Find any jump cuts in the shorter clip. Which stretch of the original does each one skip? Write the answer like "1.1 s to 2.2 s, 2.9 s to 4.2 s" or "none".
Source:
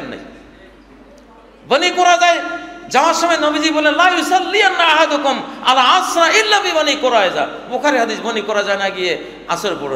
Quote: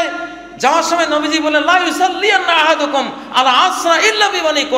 none